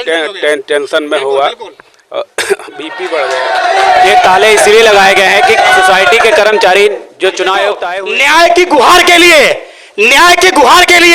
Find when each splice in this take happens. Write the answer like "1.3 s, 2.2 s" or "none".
3.4 s, 7.8 s